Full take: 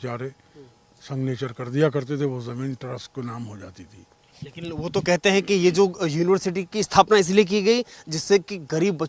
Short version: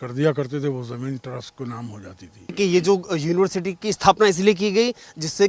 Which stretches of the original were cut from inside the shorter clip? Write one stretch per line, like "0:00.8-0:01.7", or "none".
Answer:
0:04.1-0:05.5